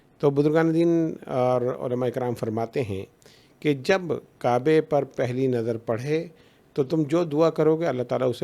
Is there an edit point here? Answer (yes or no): no